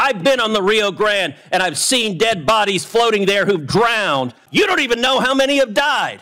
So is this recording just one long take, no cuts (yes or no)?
no